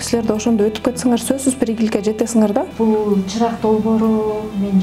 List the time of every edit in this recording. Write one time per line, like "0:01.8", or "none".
0:02.7